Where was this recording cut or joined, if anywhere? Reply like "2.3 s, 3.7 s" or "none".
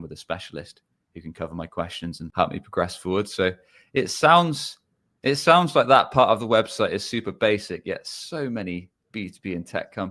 2.2 s